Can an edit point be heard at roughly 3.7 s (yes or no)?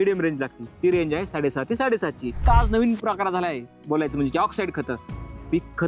no